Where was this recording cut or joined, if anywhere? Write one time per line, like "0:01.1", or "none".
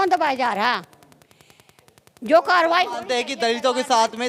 none